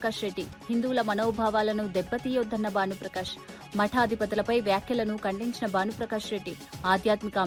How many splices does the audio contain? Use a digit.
0